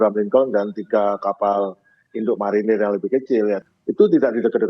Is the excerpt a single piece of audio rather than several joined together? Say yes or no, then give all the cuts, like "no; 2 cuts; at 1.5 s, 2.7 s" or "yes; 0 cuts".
no; 1 cut; at 3.7 s